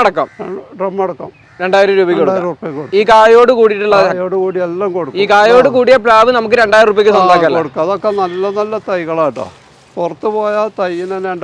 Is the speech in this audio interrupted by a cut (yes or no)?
no